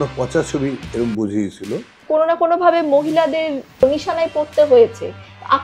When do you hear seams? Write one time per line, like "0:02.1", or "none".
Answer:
0:02.0